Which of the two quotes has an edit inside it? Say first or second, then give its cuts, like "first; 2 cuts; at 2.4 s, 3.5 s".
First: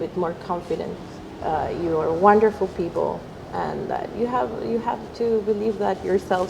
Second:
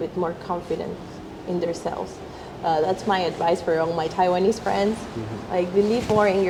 first; 1 cut; at 1.4 s